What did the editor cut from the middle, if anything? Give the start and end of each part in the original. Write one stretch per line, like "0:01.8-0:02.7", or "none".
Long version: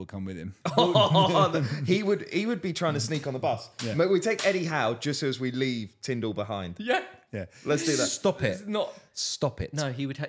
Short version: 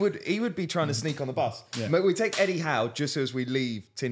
none

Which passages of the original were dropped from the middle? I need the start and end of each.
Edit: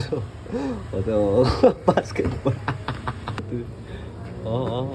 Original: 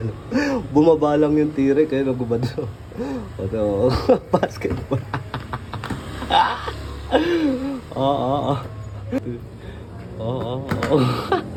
0:05.9-0:09.2

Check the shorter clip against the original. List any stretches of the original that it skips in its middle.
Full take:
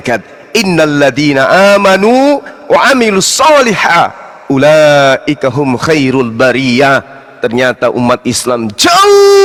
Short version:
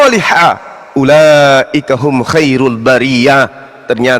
none

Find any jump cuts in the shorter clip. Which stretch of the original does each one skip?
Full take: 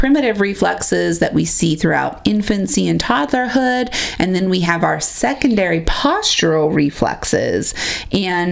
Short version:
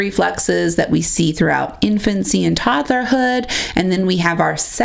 none

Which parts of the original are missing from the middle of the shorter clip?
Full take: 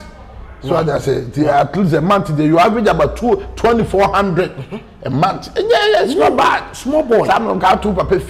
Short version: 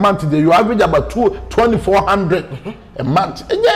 none

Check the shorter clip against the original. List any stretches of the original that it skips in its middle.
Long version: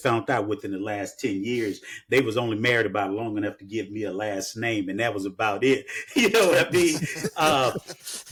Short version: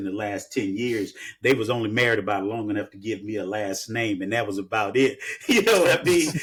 none

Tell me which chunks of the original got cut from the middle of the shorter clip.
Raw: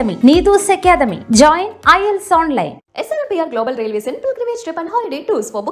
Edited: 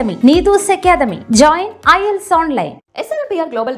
none

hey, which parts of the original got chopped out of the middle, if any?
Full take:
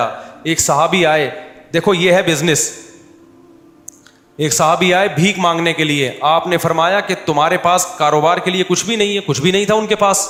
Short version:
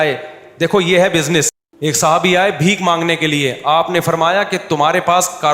0:02.8-0:04.2

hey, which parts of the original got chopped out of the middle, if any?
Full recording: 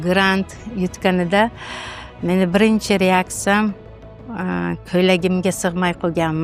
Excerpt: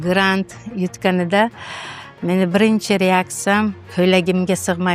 0:03.8-0:04.8

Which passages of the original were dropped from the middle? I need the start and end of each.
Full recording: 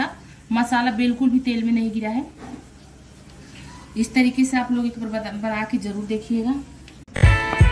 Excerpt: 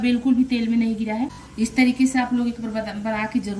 0:02.4-0:03.8

